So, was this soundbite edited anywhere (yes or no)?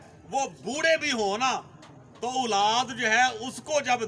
no